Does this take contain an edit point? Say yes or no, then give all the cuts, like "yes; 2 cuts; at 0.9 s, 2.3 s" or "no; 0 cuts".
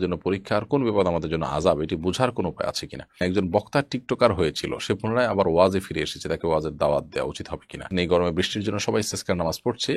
yes; 2 cuts; at 3.2 s, 7.9 s